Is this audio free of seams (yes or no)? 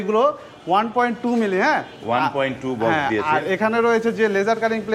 yes